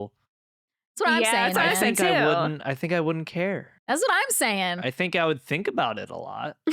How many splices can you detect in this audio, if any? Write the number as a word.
one